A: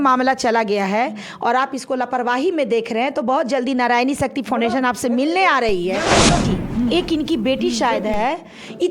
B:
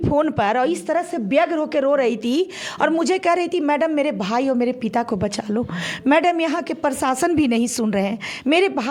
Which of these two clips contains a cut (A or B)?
A